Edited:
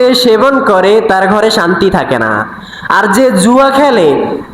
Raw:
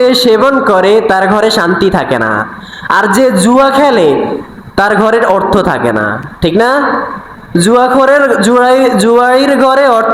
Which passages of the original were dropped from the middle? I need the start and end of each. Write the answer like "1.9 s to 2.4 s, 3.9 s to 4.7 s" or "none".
none